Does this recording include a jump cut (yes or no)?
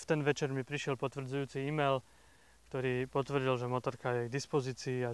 no